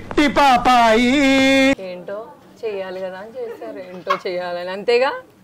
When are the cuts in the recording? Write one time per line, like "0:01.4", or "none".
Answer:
0:01.8